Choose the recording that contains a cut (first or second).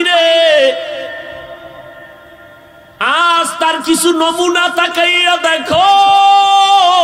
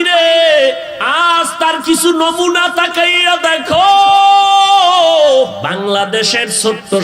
second